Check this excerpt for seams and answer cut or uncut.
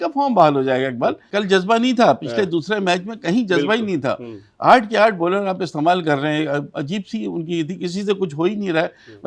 cut